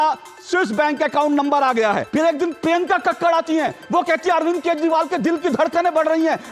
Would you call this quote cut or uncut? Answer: cut